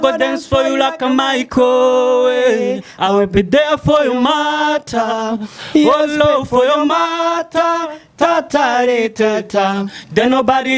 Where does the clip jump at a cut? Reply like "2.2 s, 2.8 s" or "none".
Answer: none